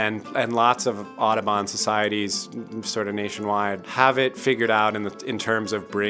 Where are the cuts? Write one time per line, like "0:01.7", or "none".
0:03.8